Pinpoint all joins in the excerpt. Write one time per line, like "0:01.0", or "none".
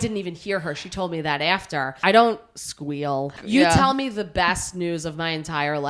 0:01.9
0:03.4